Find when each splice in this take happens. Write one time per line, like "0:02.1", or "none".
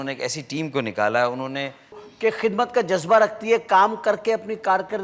0:02.0